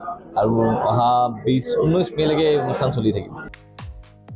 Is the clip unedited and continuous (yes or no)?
no